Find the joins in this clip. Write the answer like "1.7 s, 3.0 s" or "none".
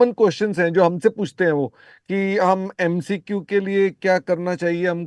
none